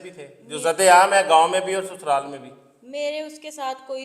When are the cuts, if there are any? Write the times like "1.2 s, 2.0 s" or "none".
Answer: none

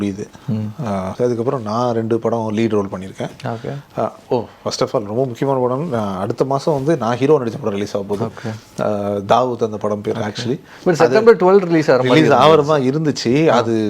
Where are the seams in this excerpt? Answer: 1.1 s

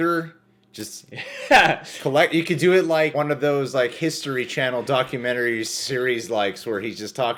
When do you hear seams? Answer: none

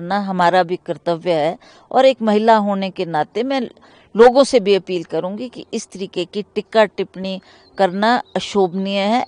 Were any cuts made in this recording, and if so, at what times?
none

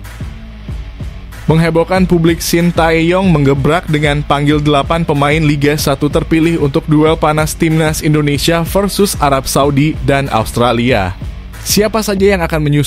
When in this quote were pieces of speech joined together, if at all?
1.4 s

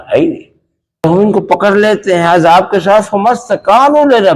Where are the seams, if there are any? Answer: 1.0 s

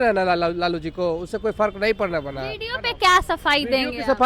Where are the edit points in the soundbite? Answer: none

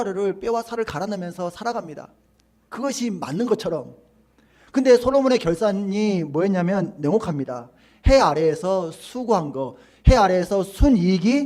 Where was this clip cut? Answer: none

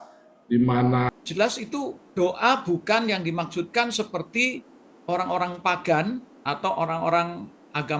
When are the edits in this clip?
1.1 s

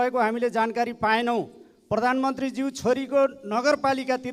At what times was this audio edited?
none

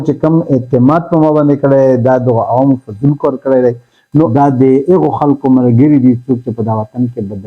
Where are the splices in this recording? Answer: 4.3 s

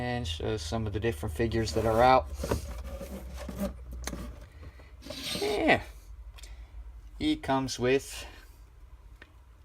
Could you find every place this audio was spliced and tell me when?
7.4 s

